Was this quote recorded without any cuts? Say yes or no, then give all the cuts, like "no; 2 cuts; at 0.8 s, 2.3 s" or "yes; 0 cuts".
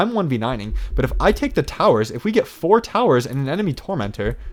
yes; 0 cuts